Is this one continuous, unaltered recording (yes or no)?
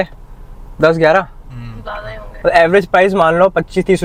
yes